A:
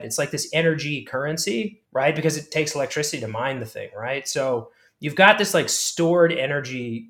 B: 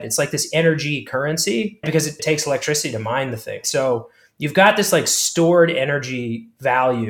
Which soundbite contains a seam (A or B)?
B